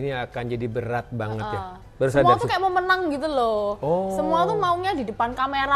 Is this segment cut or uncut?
uncut